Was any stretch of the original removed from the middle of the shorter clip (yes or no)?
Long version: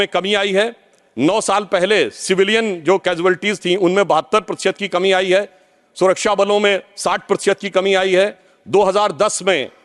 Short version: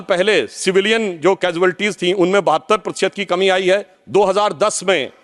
yes